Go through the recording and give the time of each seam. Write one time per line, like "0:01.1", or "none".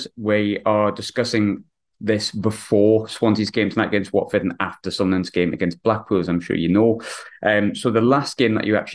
none